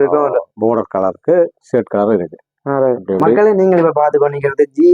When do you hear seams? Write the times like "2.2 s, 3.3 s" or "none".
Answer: 3.4 s